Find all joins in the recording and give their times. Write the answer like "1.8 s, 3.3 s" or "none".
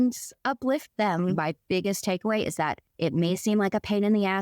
1.5 s, 2.8 s